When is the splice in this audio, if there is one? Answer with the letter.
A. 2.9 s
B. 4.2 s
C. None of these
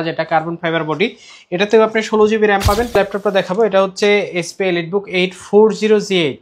A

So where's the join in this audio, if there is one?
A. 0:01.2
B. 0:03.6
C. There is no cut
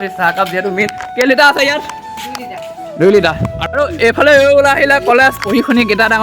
B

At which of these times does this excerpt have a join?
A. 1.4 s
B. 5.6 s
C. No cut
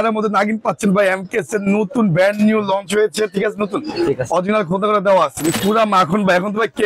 B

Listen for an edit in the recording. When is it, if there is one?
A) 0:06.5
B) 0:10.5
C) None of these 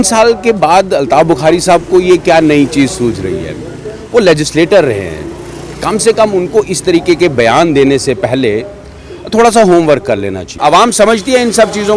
B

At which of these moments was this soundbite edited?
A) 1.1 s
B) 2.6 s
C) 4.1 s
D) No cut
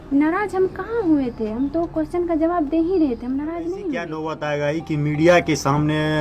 C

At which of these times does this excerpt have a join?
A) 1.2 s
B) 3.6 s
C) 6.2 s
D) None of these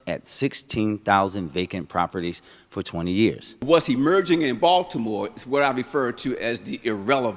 B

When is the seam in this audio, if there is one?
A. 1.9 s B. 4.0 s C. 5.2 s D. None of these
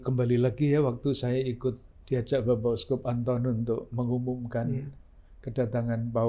A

